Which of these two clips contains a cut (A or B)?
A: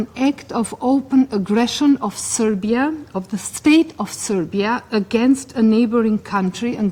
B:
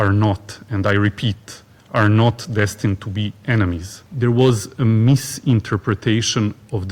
B